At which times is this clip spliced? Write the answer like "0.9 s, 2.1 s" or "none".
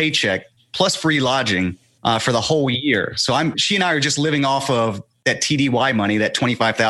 1.9 s